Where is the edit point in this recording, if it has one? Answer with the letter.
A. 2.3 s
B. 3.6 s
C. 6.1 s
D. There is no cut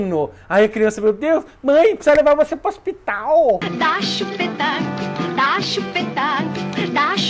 B